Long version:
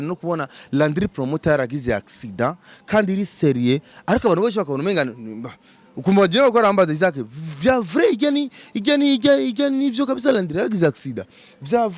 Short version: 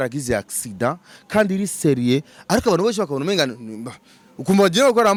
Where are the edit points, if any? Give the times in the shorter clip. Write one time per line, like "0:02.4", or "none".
none